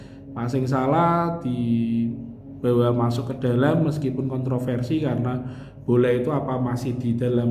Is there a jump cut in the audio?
no; 0 cuts

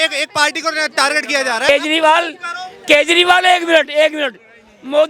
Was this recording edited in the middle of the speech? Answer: yes; 1 cut; at 1.7 s

